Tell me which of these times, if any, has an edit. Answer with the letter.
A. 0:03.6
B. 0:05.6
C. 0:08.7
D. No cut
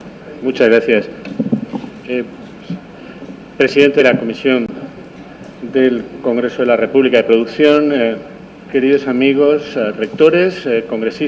B